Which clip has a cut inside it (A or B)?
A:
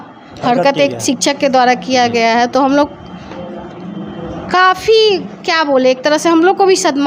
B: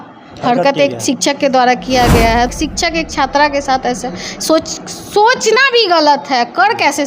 B